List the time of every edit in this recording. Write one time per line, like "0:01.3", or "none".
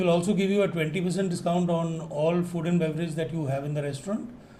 none